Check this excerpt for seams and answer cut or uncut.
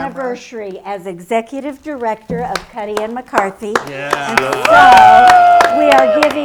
uncut